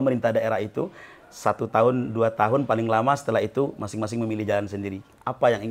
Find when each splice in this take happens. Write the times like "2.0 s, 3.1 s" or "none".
none